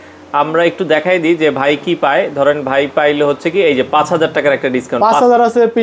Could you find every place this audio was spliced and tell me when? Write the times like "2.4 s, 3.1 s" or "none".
none